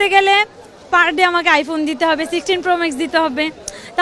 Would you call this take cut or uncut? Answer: uncut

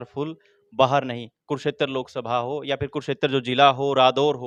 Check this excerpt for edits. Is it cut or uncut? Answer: uncut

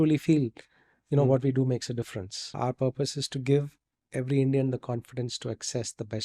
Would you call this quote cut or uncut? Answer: cut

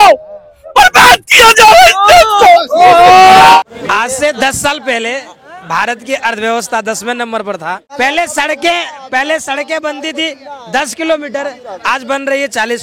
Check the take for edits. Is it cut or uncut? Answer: cut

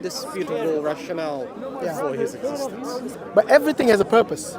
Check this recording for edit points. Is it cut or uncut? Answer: cut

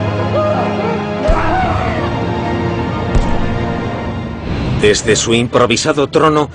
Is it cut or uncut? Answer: cut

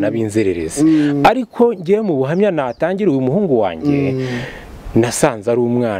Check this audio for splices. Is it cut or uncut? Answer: uncut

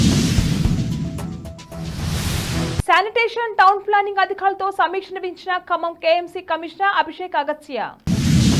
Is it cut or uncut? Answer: uncut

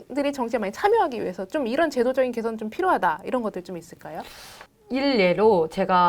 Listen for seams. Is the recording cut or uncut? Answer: uncut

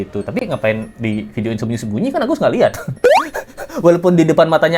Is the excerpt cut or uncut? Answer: uncut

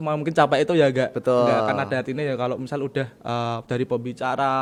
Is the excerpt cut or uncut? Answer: uncut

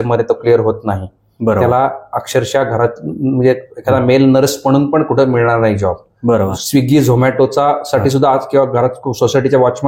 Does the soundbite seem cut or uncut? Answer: uncut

